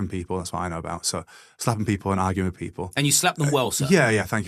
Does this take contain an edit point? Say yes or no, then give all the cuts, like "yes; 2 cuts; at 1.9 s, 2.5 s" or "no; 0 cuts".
no; 0 cuts